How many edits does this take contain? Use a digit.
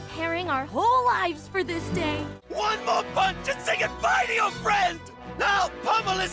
1